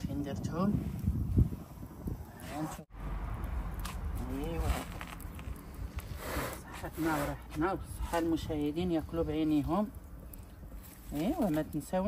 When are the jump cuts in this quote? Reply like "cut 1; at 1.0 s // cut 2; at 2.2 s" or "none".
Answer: cut 1; at 2.7 s